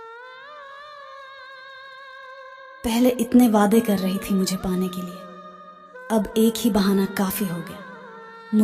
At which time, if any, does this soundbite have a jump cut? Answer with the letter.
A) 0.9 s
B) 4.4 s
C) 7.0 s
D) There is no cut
D